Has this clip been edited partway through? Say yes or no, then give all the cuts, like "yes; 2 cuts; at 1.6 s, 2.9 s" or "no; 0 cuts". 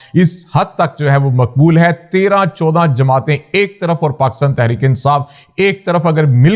no; 0 cuts